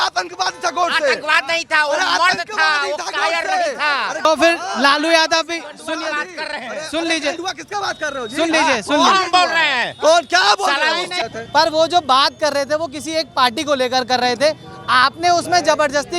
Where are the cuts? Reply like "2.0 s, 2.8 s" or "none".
4.2 s, 11.3 s